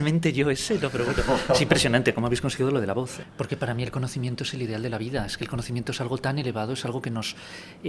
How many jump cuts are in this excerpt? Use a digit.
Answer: 1